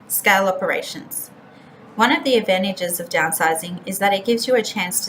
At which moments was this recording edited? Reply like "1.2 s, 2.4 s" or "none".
3.0 s

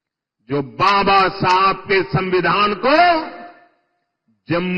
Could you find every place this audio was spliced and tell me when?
none

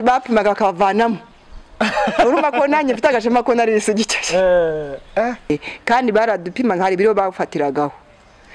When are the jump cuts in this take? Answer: 5.5 s

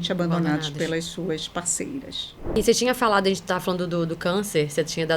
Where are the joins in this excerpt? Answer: 2.6 s

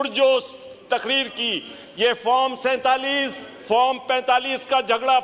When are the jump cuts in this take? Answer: none

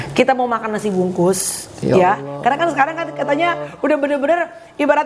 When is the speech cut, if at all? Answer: none

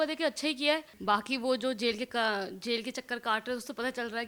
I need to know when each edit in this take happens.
0.9 s

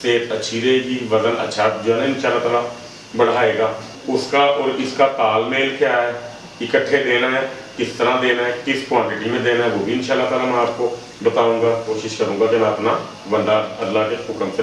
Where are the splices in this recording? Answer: 3.9 s, 12.0 s

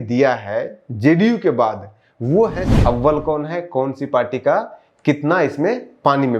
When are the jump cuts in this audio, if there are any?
2.7 s

